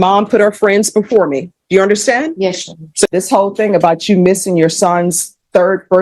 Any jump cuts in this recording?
yes; 1 cut; at 3.1 s

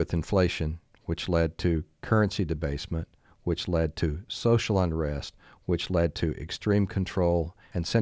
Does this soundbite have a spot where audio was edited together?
no; 0 cuts

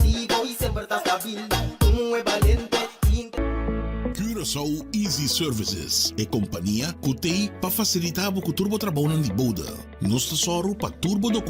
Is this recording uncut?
no; 1 cut; at 3.2 s

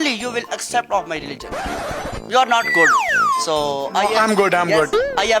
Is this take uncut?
no; 1 cut; at 2.2 s

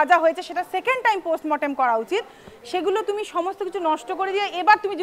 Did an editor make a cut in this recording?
no; 0 cuts

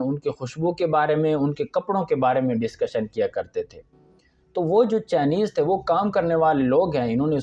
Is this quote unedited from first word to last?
yes; 0 cuts

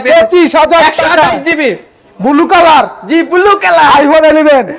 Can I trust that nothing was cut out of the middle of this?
yes; 0 cuts

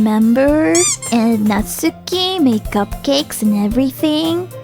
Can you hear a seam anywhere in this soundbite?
yes; 1 cut; at 1.0 s

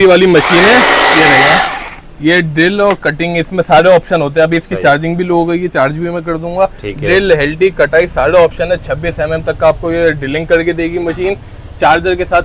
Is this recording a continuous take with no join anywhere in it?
yes; 0 cuts

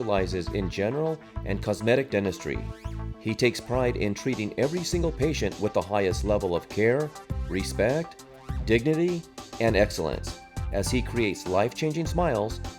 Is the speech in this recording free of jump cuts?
yes; 0 cuts

